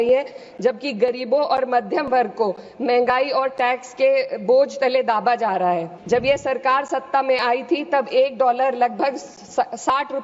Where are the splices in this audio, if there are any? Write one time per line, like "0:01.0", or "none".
0:05.9